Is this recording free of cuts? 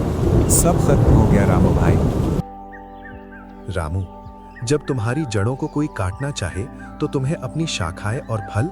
no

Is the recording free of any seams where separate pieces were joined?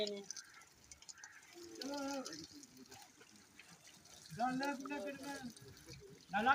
yes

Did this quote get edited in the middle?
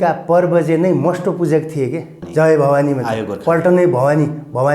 yes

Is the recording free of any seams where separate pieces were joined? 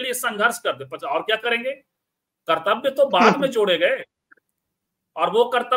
yes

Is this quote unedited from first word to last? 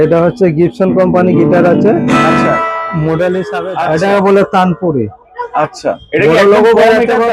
no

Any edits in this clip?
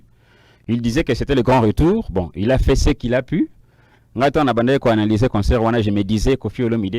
no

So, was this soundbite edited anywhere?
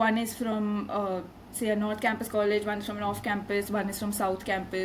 no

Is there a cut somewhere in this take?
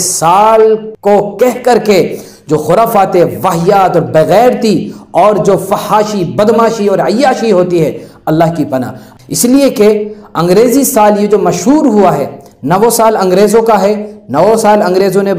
yes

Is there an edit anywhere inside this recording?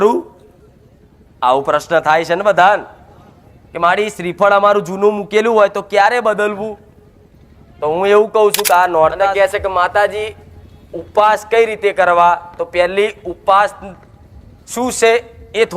yes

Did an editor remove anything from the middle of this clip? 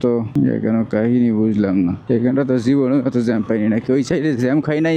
no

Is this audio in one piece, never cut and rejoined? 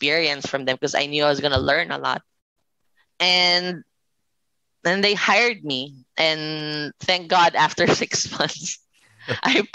yes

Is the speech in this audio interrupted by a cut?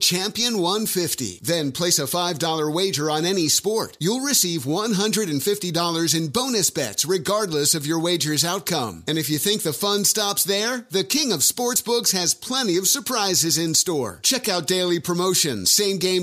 no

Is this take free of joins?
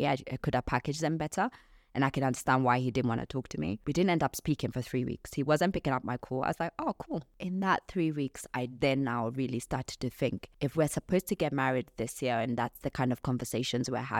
no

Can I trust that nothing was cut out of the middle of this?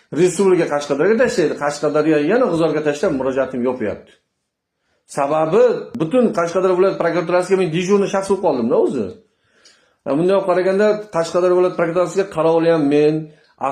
yes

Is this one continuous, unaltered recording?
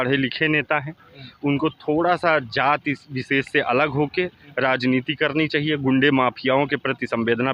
yes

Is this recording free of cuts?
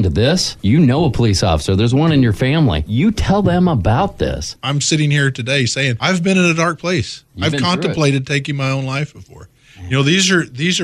no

